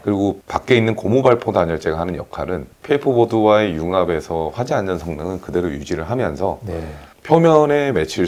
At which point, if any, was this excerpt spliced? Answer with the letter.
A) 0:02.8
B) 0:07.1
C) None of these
A